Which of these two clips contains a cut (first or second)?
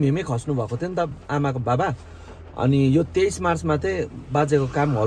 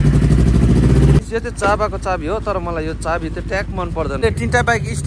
second